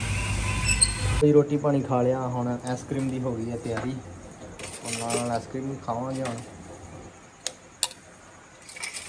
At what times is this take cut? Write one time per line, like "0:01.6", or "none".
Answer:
0:01.2